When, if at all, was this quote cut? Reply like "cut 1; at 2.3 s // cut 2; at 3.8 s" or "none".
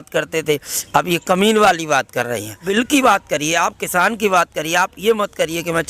cut 1; at 2.6 s